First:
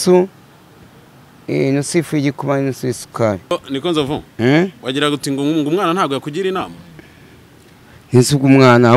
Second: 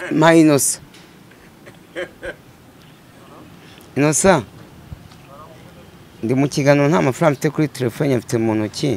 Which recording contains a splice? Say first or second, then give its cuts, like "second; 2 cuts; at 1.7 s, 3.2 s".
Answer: first; 1 cut; at 3.5 s